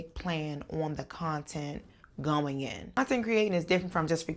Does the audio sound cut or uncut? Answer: cut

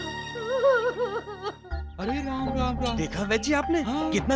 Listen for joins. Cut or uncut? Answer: uncut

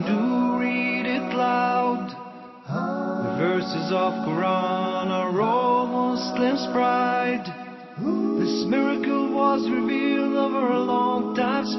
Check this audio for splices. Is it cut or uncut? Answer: cut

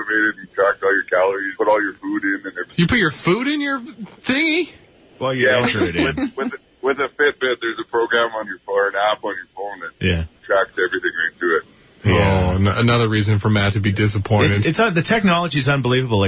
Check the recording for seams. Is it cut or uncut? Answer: uncut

